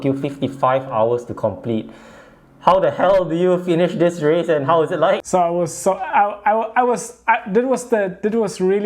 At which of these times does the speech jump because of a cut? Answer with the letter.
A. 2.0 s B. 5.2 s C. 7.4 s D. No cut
B